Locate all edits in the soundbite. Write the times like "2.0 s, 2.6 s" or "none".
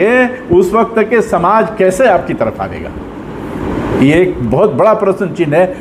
none